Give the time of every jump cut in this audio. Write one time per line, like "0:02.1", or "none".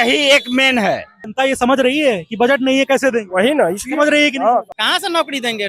0:01.2
0:04.7